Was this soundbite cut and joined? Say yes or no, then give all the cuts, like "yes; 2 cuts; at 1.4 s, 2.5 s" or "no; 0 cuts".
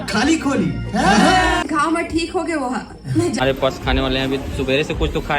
yes; 2 cuts; at 1.7 s, 3.4 s